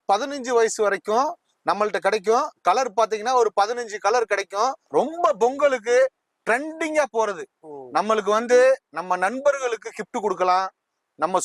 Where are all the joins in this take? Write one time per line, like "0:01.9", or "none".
0:04.9